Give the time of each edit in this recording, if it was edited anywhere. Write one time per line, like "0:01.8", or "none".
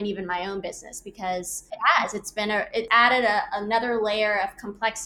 0:01.6
0:02.9